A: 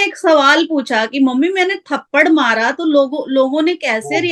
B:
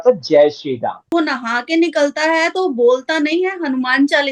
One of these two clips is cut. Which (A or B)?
B